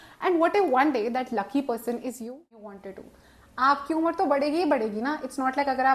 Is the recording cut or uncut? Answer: cut